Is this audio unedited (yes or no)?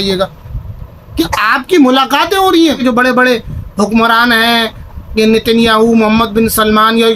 no